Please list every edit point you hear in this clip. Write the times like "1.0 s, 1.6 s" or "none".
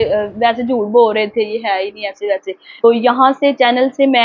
2.8 s